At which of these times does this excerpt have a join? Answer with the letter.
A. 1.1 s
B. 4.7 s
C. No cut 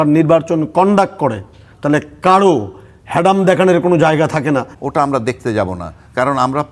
B